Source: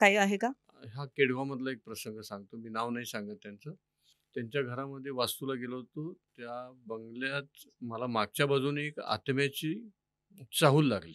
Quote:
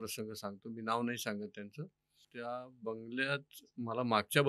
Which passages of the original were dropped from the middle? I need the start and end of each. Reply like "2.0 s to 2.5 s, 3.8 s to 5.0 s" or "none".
4.1 s to 6.3 s